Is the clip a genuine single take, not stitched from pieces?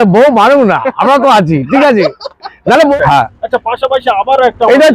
no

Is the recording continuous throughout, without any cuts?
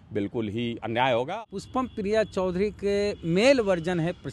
no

